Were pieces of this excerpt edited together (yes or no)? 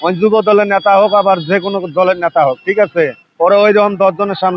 no